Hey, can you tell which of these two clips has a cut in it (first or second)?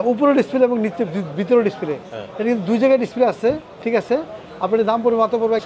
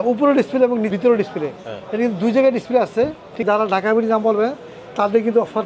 second